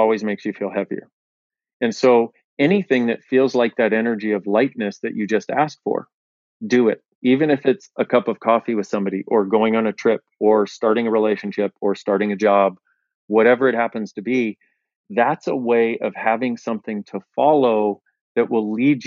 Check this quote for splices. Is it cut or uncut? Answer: uncut